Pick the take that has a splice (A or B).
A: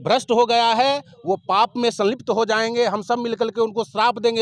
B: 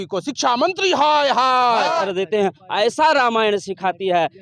B